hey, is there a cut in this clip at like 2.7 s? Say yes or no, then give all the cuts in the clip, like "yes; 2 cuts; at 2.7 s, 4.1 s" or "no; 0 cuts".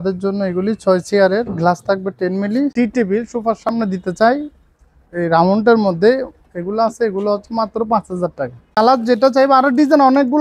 yes; 2 cuts; at 2.7 s, 8.8 s